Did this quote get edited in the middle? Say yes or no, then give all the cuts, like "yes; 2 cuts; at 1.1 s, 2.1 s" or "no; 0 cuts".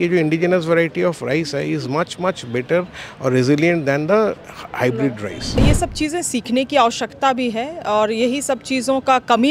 yes; 1 cut; at 5.6 s